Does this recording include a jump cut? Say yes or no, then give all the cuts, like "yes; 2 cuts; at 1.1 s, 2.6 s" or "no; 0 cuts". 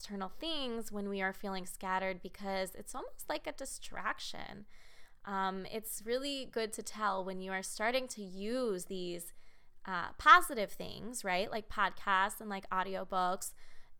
no; 0 cuts